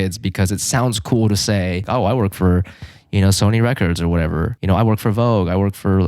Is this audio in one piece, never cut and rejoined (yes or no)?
no